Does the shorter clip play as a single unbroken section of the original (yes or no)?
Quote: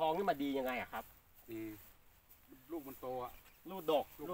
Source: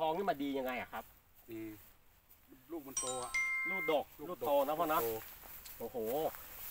yes